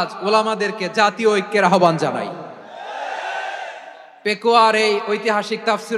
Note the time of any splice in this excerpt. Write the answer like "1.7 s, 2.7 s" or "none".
none

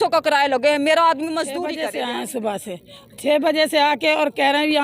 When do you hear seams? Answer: 1.7 s

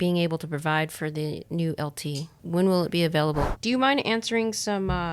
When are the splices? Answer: 2.4 s, 3.5 s

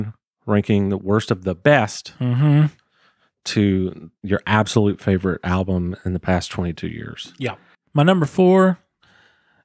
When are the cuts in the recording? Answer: 7.7 s

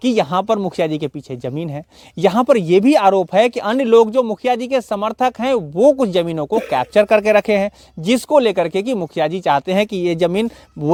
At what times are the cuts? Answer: none

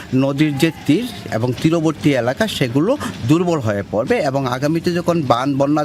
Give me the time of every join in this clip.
none

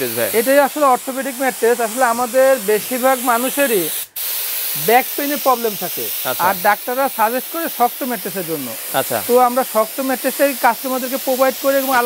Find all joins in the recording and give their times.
none

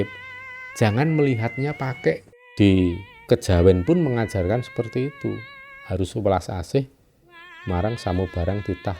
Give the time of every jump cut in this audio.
2.4 s

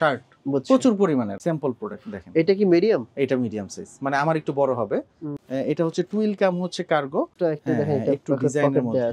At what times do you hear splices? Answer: 1.4 s, 5.2 s, 7.3 s

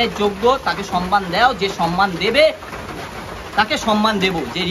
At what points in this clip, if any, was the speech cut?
none

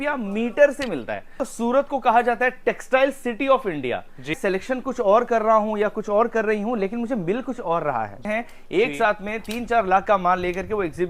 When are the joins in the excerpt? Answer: 1.4 s, 4.4 s, 8.2 s

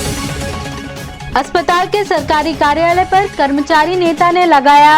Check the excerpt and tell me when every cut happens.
none

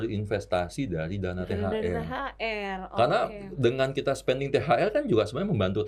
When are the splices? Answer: none

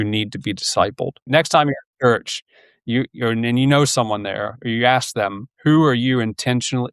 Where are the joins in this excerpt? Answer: 1.3 s

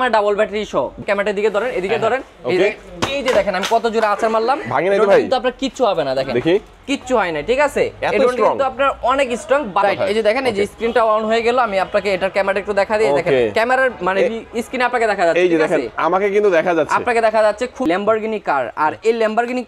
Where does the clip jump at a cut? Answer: 1.0 s, 9.8 s, 17.8 s

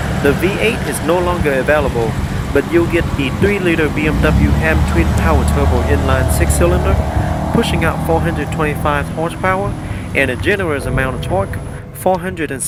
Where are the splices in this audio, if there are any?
none

